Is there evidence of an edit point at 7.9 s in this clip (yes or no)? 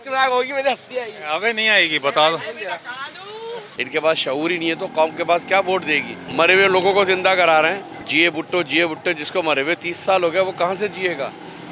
yes